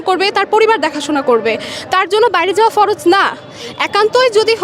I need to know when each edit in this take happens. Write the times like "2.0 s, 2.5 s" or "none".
none